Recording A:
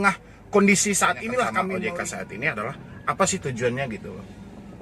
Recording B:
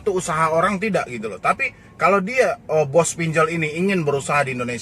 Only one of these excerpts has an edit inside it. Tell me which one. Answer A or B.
A